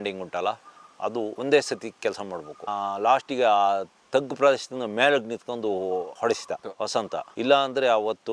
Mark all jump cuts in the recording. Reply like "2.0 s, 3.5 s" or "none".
none